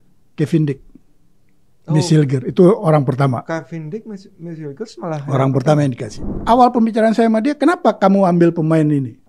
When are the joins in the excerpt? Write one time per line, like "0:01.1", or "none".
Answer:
0:06.3